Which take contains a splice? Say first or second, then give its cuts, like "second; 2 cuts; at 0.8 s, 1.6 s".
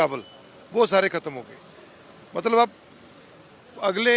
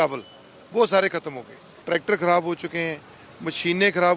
second; 1 cut; at 1.8 s